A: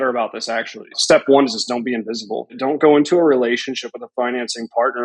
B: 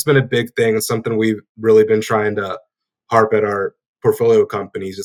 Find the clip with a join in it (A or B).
A